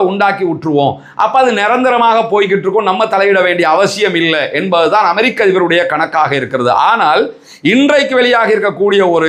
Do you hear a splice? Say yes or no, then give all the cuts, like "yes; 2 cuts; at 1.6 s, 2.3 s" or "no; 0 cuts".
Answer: no; 0 cuts